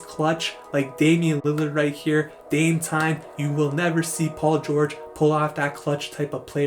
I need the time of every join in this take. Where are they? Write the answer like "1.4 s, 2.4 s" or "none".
none